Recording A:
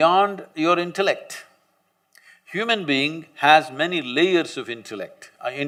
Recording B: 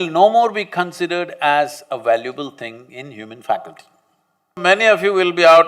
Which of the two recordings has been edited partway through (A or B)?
B